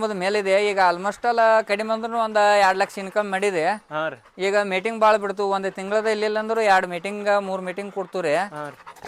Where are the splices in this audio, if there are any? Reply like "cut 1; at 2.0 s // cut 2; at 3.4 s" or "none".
none